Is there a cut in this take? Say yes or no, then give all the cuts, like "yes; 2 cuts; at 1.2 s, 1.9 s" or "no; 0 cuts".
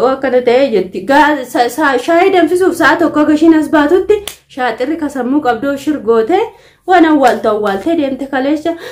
no; 0 cuts